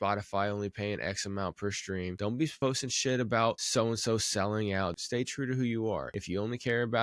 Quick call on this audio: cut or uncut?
cut